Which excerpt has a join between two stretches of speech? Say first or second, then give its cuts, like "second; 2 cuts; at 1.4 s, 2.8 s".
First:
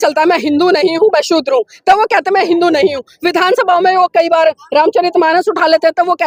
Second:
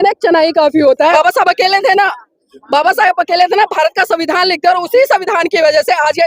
second; 1 cut; at 1.1 s